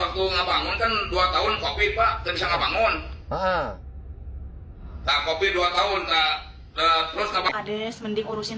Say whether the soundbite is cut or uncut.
cut